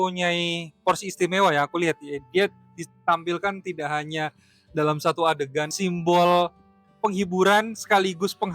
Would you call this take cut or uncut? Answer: cut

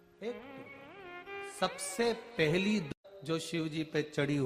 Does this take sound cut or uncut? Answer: uncut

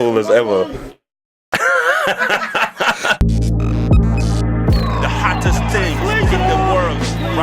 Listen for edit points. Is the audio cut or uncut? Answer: cut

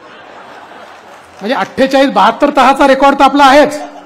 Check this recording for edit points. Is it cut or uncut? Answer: uncut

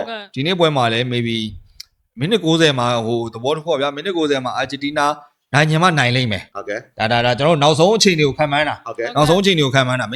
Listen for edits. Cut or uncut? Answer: uncut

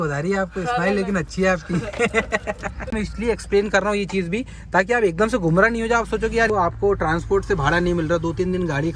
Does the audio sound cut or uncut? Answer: cut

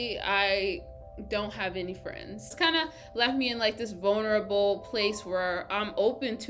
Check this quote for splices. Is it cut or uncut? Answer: cut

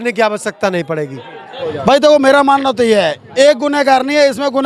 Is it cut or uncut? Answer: cut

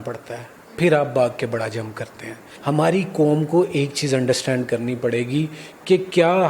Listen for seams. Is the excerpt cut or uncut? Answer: cut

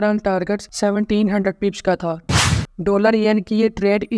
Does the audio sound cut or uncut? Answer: cut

